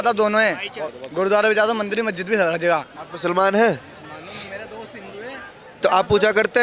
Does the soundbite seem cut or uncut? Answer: cut